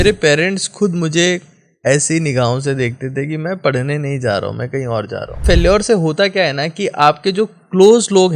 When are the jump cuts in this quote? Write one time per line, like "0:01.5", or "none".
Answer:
0:05.4